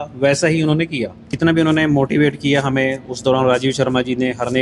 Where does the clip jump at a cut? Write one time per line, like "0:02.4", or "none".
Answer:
0:01.3